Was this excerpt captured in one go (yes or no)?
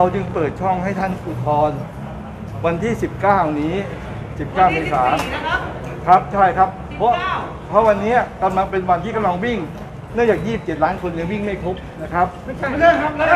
yes